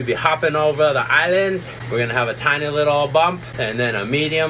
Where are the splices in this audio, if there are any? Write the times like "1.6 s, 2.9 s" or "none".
1.8 s, 3.5 s